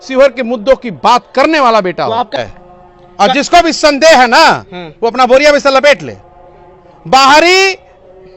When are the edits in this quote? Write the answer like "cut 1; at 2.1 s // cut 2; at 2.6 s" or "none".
cut 1; at 2.4 s